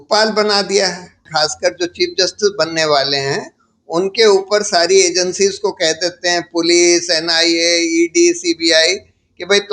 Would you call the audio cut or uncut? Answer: cut